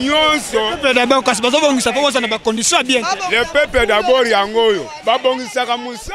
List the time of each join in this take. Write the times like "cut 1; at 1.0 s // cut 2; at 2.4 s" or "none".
none